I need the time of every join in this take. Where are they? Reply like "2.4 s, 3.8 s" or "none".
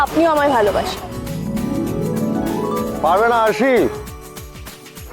3.0 s